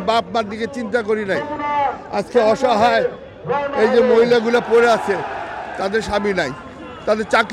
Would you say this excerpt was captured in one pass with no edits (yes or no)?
yes